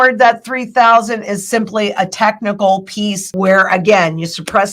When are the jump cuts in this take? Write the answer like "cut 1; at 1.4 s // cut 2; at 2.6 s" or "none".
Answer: cut 1; at 3.2 s